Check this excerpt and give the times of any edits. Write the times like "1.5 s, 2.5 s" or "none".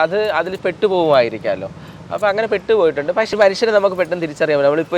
3.3 s